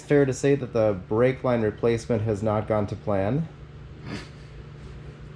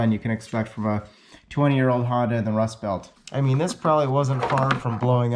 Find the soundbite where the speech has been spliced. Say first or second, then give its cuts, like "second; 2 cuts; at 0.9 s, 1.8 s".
second; 1 cut; at 3.1 s